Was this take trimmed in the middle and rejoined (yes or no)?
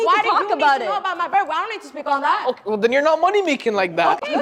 no